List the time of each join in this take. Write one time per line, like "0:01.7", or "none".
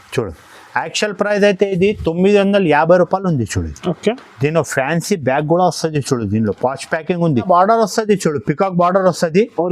0:07.4